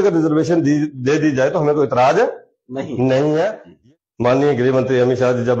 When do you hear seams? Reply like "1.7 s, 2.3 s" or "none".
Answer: 3.7 s